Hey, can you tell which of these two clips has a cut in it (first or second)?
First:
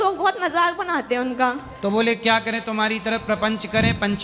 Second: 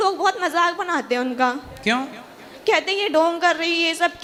first